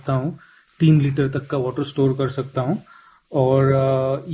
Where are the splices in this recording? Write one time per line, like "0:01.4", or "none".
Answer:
none